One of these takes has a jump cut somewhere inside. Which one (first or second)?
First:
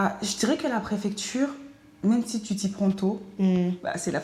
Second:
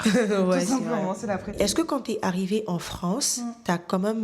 second